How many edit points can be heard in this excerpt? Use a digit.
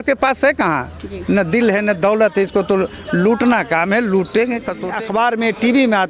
1